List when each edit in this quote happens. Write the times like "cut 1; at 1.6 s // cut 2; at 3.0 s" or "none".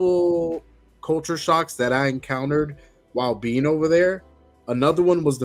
none